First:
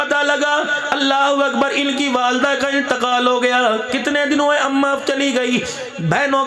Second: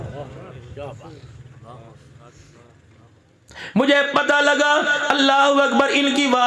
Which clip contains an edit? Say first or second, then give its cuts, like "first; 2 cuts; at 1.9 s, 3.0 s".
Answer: second; 1 cut; at 3.1 s